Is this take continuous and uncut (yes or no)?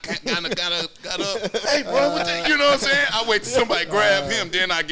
no